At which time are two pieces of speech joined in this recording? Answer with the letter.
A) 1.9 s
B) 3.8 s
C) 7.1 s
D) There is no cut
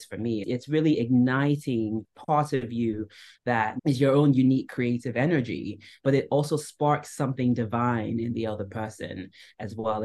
B